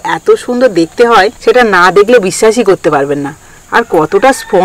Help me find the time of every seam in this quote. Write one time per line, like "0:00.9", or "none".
0:01.3